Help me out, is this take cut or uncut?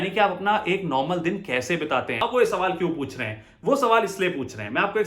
cut